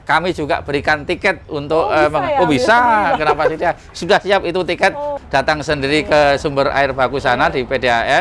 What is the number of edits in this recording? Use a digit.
1